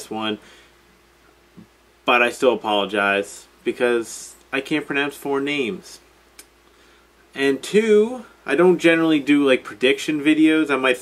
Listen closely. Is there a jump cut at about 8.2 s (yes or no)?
no